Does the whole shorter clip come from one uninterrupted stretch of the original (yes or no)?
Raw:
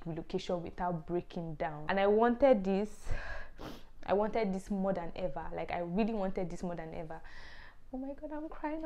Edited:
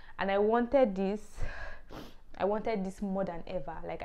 yes